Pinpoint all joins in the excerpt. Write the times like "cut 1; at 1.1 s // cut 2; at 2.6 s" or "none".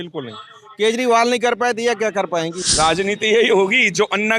cut 1; at 2.6 s

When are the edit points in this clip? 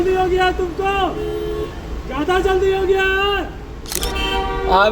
cut 1; at 4.0 s

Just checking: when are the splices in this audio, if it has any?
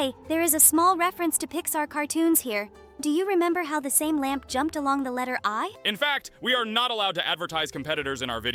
none

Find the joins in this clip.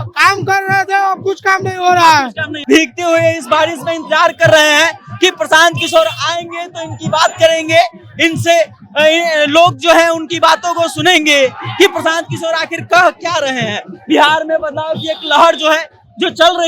cut 1; at 2.5 s

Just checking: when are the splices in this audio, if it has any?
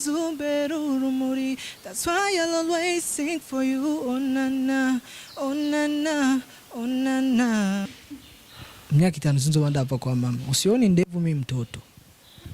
cut 1; at 7.9 s

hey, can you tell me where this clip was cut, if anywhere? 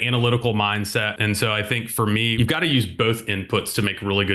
cut 1; at 1.1 s // cut 2; at 2.3 s

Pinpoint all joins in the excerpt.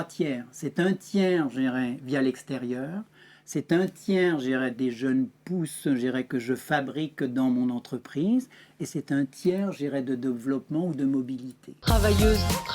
cut 1; at 11.7 s

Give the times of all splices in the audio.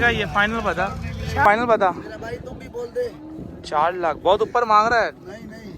cut 1; at 1.4 s

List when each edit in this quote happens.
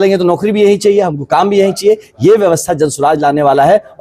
none

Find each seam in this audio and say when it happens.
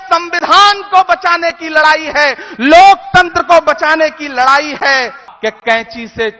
cut 1; at 5.3 s

